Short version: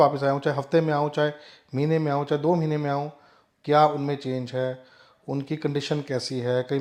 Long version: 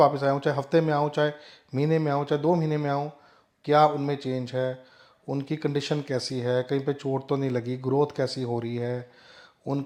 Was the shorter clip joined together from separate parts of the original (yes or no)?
no